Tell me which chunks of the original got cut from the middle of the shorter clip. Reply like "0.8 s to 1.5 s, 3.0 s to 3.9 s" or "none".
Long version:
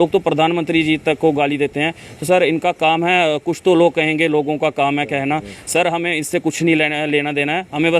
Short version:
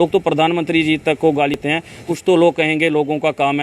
2.1 s to 3.5 s